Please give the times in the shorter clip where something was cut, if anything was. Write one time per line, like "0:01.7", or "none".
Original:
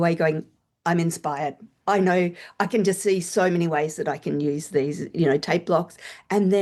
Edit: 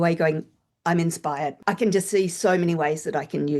0:01.6